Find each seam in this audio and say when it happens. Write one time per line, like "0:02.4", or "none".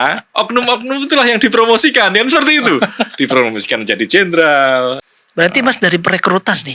0:05.0

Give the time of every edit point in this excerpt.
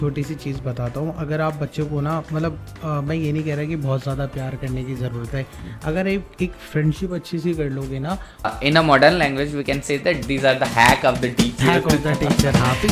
0:08.5

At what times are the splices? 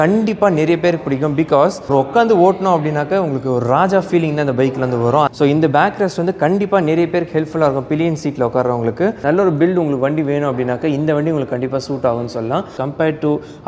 0:01.8
0:05.3
0:09.2
0:12.7

